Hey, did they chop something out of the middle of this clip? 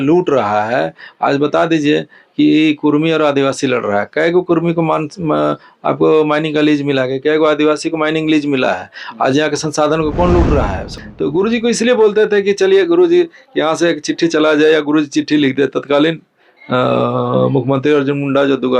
yes; 1 cut; at 10.9 s

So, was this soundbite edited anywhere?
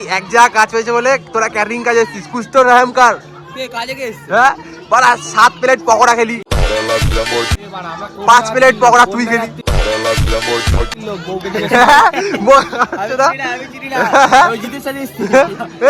no; 0 cuts

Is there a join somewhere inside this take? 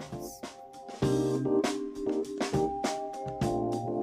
no; 0 cuts

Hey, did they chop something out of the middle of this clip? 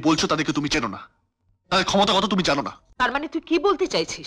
yes; 1 cut; at 2.8 s

